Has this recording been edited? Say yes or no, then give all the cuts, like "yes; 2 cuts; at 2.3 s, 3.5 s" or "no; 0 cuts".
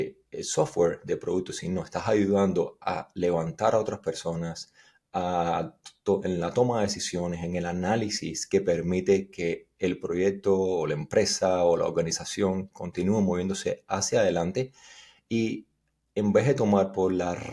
no; 0 cuts